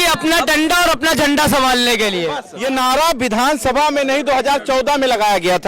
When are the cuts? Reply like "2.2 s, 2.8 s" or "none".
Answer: 2.5 s